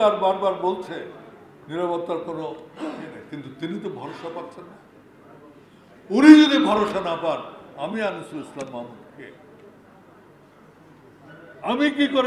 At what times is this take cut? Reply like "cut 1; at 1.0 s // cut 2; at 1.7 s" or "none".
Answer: none

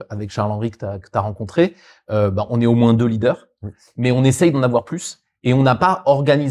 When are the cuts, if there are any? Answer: none

